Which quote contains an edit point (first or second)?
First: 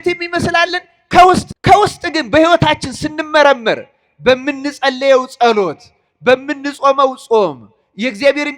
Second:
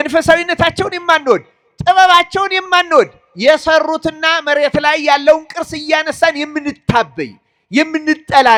first